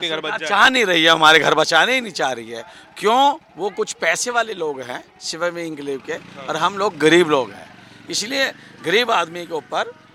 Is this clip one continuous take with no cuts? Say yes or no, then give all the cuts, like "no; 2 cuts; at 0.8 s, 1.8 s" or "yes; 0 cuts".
yes; 0 cuts